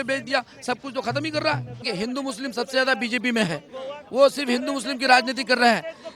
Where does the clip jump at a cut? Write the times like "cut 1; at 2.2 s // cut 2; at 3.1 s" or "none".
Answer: cut 1; at 1.9 s